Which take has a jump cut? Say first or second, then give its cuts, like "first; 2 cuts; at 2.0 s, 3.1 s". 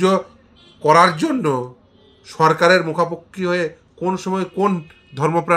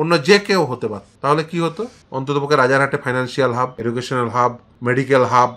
second; 4 cuts; at 1.1 s, 2.0 s, 3.8 s, 4.7 s